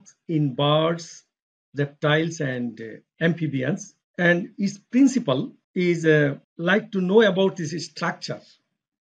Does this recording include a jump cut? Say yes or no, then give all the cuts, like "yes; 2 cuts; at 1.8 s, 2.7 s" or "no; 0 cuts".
yes; 3 cuts; at 4.0 s, 5.6 s, 6.5 s